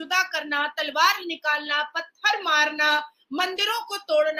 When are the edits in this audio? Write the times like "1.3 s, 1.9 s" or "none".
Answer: none